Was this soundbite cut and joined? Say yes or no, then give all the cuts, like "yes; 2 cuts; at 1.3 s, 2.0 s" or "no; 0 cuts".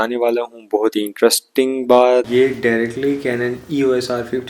yes; 1 cut; at 2.3 s